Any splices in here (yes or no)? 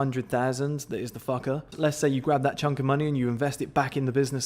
yes